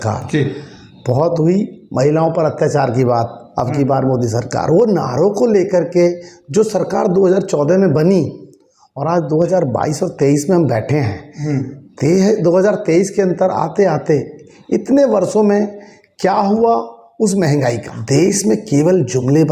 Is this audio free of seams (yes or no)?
no